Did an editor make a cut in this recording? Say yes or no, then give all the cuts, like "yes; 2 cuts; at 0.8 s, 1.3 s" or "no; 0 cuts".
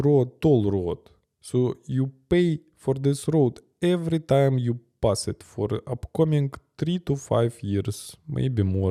no; 0 cuts